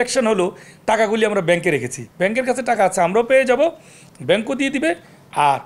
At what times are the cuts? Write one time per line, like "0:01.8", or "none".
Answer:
0:02.0